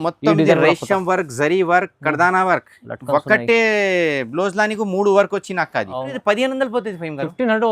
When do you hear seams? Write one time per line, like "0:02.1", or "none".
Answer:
0:06.1

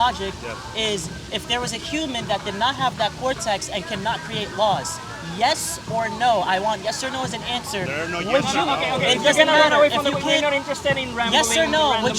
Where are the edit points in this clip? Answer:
none

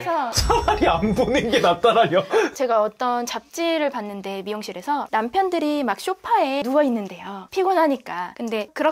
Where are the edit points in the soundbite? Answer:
none

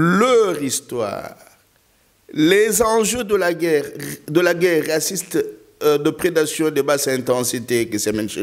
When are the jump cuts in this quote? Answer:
none

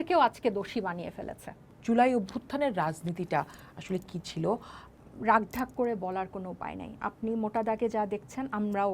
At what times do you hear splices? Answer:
0:01.7
0:04.9

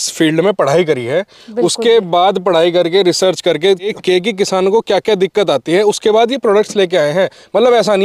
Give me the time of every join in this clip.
0:03.9

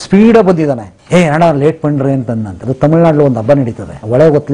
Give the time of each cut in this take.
0:02.6

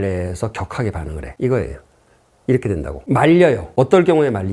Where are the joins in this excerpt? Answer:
0:01.2
0:03.0
0:03.6

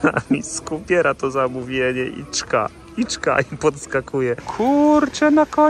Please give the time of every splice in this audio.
0:04.4

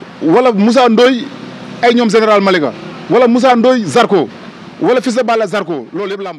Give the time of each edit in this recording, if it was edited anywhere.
none

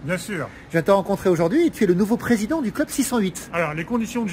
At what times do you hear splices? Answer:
0:03.4

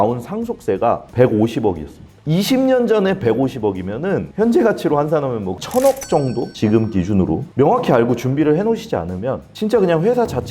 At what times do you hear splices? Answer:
0:07.5

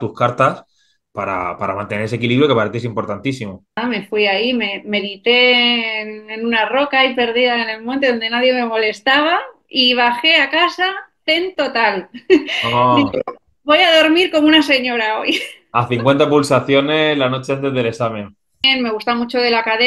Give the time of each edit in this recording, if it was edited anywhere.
0:03.8
0:18.7

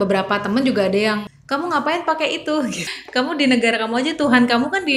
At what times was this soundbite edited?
0:01.3
0:02.9

